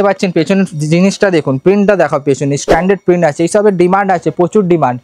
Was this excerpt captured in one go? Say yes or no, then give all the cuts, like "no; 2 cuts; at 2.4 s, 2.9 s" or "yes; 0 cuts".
yes; 0 cuts